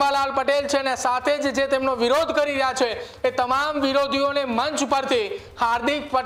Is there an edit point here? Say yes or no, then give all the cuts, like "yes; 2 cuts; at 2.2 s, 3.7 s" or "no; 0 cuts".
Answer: no; 0 cuts